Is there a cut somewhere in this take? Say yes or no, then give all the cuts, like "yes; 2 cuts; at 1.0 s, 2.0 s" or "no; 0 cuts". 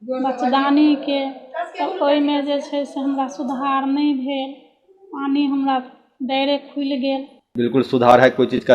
yes; 1 cut; at 7.4 s